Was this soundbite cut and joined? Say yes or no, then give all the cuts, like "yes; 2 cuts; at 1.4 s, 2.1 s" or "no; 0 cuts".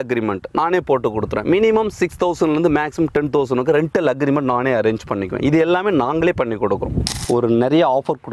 yes; 1 cut; at 7.2 s